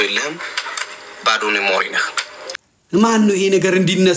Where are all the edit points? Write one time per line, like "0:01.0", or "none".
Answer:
0:03.0